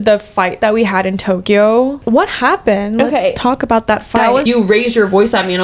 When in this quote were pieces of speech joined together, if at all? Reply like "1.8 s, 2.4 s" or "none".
2.0 s, 4.4 s

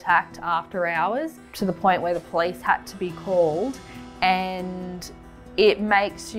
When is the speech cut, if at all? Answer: none

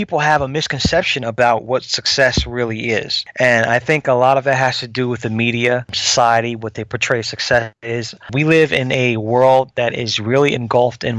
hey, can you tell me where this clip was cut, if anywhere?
3.2 s, 6.0 s, 8.3 s

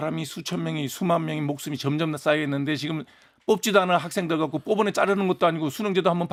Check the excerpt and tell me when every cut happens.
none

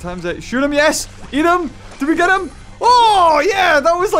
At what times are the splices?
none

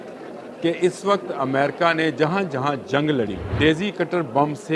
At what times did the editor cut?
3.4 s

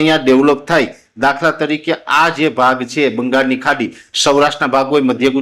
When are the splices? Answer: 4.1 s

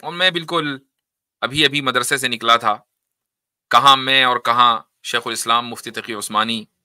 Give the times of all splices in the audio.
none

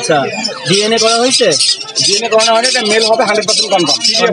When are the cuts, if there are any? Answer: none

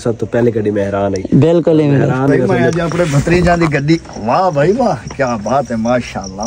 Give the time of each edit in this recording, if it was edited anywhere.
2.7 s

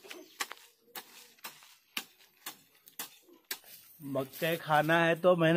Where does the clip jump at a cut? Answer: 4.0 s

